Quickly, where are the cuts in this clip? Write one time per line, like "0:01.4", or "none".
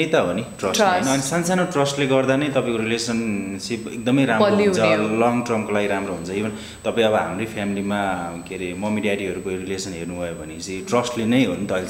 none